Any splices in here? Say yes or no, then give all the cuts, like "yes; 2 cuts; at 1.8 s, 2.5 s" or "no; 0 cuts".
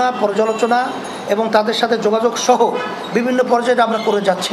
no; 0 cuts